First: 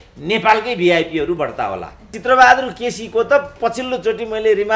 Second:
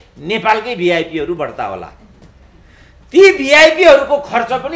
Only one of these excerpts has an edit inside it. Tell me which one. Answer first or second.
first